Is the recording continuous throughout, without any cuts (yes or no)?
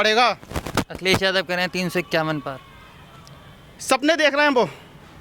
yes